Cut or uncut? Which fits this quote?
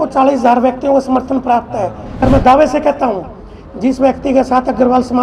cut